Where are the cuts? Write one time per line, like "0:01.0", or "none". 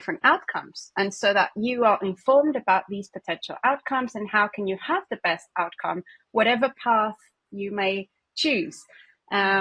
none